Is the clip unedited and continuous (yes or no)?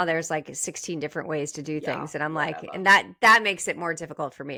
yes